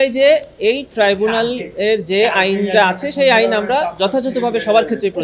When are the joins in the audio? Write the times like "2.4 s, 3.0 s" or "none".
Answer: none